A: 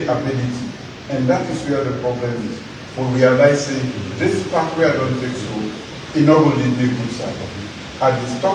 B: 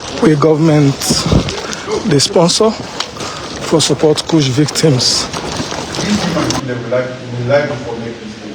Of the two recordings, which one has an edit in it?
B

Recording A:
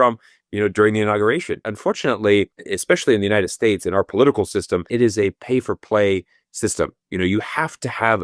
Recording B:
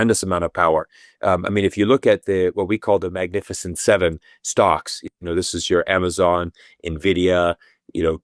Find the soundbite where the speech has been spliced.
A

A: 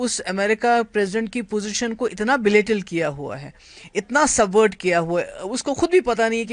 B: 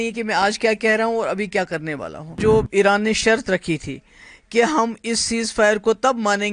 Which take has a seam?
B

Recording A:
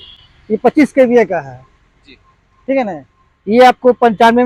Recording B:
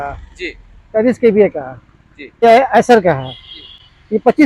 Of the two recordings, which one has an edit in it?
B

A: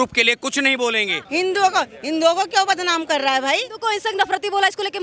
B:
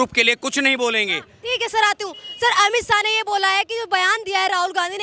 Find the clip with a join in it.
A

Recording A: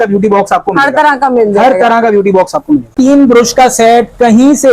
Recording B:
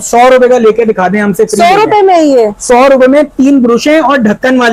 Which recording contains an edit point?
A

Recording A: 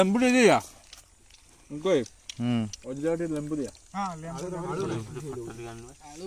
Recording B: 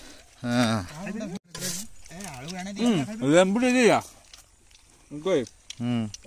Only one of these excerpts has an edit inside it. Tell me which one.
B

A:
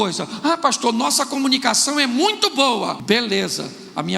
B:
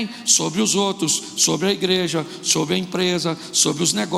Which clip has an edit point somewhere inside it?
A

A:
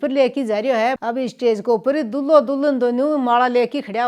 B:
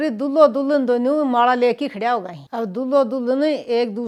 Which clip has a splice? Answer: A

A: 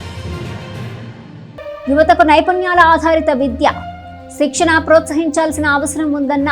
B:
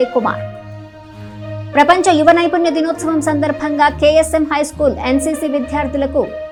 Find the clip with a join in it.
A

